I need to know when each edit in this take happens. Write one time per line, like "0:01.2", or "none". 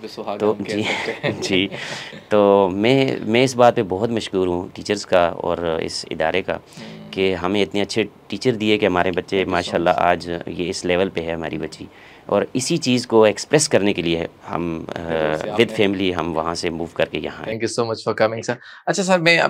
none